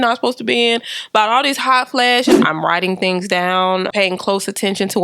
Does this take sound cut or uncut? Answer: cut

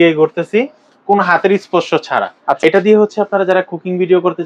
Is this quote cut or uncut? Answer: cut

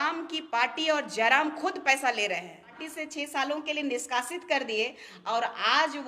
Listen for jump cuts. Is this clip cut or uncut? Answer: cut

